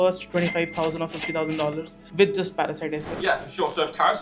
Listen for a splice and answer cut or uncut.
cut